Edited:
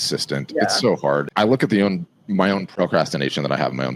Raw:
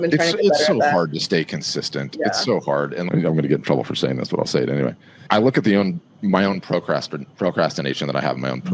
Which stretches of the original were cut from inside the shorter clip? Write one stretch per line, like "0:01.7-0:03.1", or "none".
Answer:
0:02.9-0:05.2
0:06.6-0:07.3